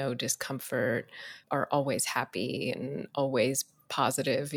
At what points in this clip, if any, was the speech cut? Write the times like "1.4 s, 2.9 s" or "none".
1.3 s